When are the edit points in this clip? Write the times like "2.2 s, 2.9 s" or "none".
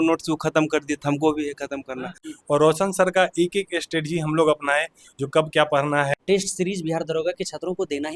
2.2 s, 6.2 s